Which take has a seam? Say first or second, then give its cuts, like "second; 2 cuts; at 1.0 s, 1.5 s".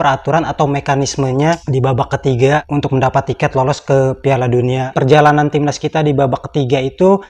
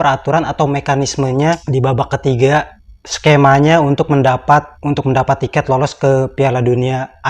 first; 2 cuts; at 2.7 s, 4.9 s